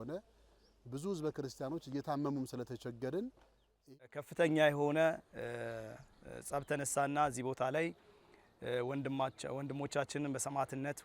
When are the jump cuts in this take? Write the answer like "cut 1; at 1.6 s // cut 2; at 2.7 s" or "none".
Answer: cut 1; at 4.0 s